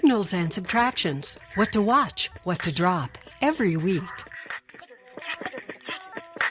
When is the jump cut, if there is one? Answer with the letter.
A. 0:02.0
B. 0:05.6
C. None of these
C